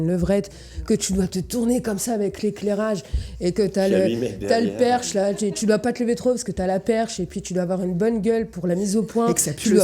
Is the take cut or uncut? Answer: uncut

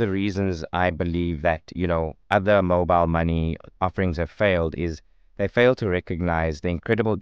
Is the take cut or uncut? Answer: uncut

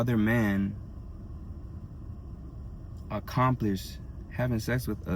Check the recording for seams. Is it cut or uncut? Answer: uncut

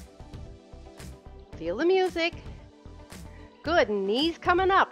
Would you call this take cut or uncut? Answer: uncut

